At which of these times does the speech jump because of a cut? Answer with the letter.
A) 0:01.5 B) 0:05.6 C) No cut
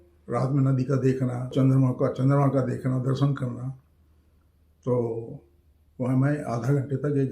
A